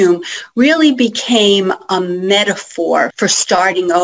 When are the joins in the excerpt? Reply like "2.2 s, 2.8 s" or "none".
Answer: 3.1 s